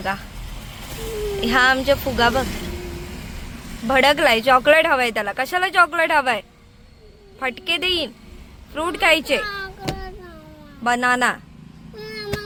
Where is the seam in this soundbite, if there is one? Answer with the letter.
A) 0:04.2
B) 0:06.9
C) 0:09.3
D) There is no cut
D